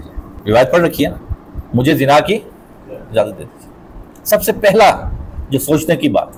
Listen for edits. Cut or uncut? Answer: uncut